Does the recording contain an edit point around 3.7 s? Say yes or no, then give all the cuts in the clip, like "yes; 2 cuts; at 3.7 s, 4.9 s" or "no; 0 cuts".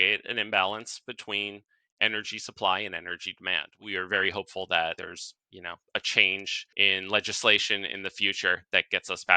yes; 3 cuts; at 3.7 s, 5.0 s, 6.6 s